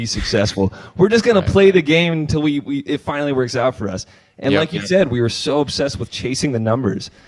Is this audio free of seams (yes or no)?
yes